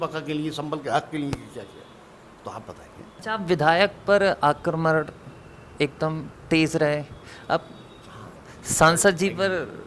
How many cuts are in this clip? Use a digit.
1